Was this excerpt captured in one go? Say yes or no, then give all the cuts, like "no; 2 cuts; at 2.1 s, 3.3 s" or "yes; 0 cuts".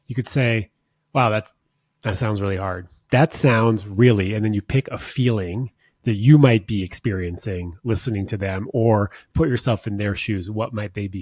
no; 1 cut; at 2.9 s